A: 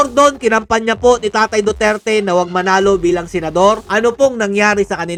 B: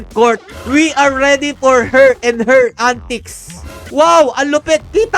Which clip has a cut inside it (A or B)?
B